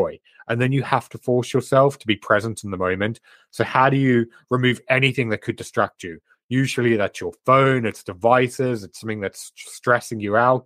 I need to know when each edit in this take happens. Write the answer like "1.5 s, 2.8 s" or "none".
none